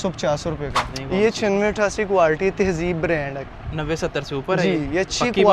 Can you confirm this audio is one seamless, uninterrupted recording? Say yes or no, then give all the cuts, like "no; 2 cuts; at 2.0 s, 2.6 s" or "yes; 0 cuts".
no; 1 cut; at 0.9 s